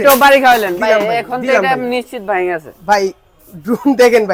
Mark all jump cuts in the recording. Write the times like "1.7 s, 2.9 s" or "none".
none